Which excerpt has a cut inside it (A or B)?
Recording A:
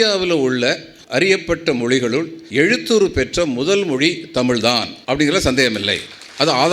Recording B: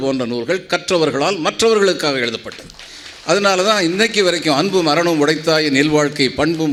A